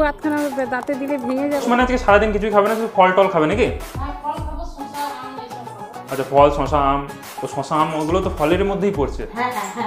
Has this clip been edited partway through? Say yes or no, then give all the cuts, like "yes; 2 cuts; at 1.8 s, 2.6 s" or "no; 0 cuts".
yes; 1 cut; at 1.6 s